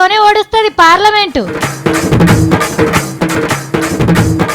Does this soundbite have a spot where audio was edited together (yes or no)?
yes